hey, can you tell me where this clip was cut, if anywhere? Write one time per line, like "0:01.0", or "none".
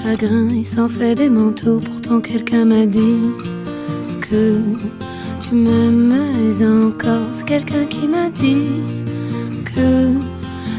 none